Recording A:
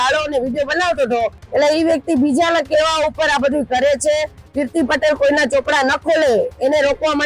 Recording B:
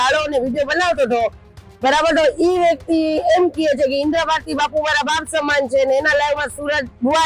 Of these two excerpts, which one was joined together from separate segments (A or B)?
A